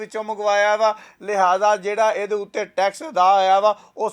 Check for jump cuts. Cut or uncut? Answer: uncut